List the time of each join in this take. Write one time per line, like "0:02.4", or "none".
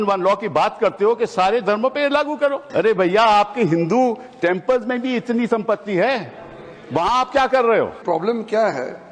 0:02.6
0:08.0